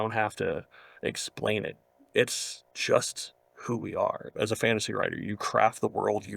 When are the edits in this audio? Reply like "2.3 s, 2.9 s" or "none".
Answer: 4.3 s